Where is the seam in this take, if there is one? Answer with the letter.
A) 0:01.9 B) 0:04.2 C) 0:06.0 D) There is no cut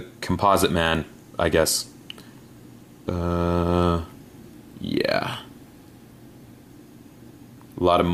D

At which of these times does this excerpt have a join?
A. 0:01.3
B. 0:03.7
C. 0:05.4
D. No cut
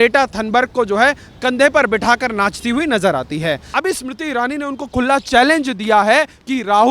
B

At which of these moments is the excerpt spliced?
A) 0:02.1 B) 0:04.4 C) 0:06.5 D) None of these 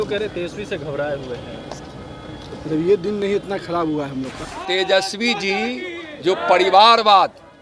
B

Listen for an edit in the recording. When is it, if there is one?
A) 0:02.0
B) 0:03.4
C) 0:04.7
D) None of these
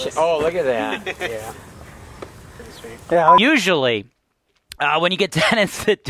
B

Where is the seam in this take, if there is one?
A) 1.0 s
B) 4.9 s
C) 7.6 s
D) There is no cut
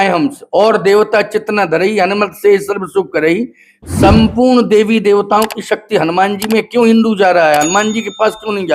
D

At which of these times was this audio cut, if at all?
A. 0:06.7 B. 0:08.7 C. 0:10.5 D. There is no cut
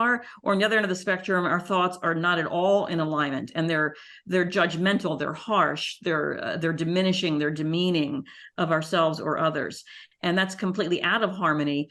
D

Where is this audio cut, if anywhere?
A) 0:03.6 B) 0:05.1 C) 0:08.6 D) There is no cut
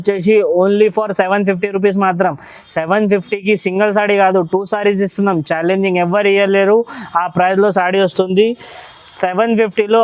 D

